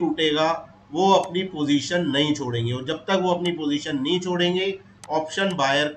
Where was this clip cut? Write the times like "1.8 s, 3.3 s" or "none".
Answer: none